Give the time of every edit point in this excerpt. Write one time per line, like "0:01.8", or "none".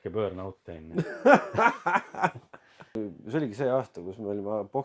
0:03.0